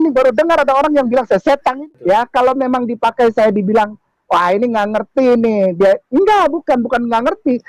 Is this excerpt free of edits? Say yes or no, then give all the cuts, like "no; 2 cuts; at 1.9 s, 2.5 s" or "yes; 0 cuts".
no; 1 cut; at 1.8 s